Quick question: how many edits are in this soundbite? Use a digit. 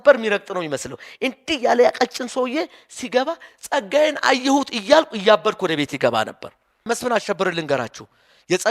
1